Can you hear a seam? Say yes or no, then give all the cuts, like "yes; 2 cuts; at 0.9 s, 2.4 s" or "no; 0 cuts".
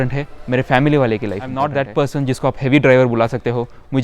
yes; 1 cut; at 1.7 s